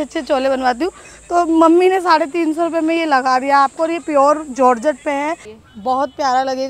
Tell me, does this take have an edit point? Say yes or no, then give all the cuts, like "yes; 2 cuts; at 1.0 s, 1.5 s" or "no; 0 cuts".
yes; 1 cut; at 5.5 s